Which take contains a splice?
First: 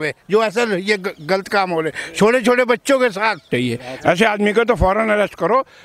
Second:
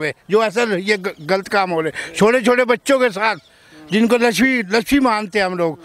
first; 1 cut; at 3.4 s

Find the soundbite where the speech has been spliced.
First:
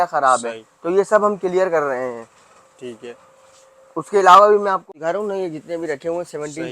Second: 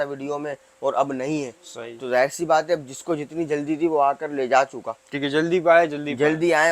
first; 1 cut; at 4.9 s

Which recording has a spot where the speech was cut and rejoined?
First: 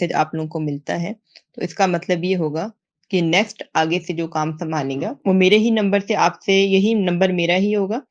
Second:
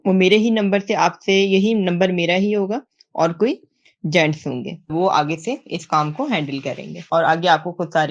second; 1 cut; at 4.9 s

